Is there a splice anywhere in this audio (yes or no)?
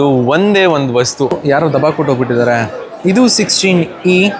yes